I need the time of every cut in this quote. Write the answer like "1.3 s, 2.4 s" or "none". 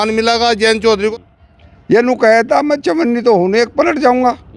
1.1 s

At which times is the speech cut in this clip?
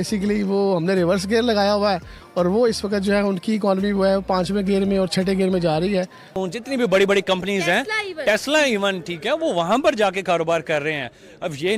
6.3 s

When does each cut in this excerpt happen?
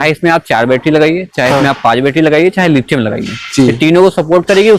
none

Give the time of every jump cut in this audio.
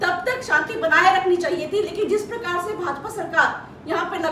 none

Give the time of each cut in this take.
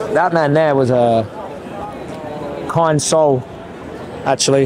none

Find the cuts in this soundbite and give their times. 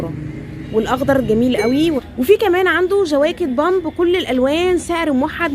1.8 s

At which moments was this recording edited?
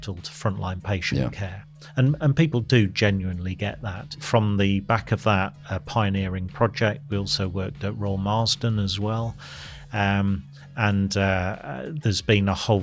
4.1 s

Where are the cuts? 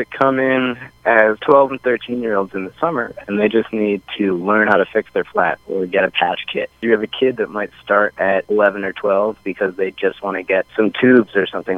1.4 s, 6.8 s, 8.2 s, 10.7 s

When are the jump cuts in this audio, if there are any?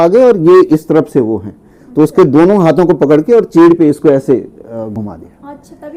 none

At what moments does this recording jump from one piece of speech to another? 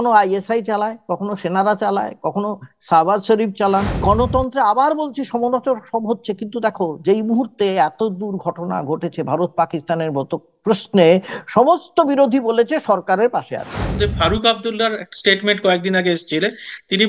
3.9 s, 13.9 s

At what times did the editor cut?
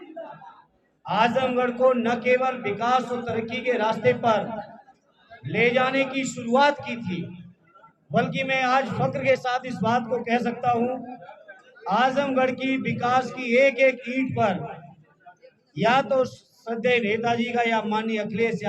8.1 s

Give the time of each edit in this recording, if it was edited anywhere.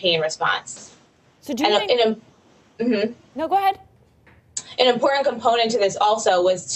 3.0 s

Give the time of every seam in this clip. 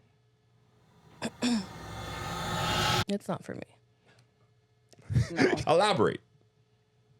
5.6 s

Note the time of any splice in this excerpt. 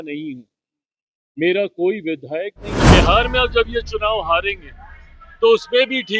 2.7 s

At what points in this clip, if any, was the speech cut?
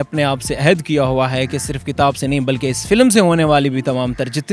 none

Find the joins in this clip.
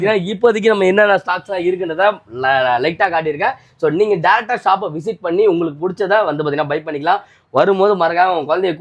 none

